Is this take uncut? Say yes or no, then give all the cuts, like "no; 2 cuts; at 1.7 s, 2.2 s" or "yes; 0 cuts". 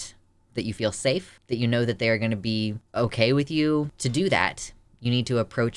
no; 1 cut; at 4.0 s